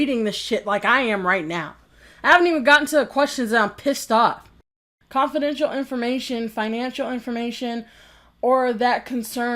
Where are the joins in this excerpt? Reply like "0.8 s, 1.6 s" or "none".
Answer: 4.9 s